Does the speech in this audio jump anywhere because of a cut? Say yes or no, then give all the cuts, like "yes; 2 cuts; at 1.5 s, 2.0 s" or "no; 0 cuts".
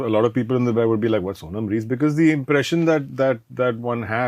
no; 0 cuts